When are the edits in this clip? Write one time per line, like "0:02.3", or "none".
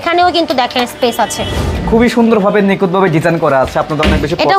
0:01.8